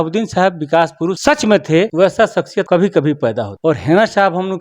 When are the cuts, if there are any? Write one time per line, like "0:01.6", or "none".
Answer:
0:01.2
0:02.1
0:03.5